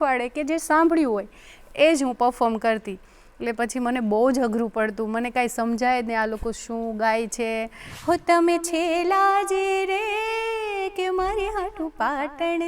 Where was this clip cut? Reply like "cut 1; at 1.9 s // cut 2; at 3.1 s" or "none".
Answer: cut 1; at 7.8 s